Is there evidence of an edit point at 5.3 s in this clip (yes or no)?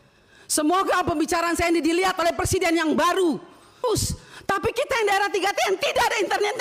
no